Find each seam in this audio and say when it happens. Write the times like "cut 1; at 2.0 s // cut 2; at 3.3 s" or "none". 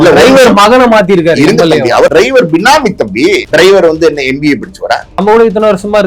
cut 1; at 2.1 s // cut 2; at 3.4 s // cut 3; at 5.2 s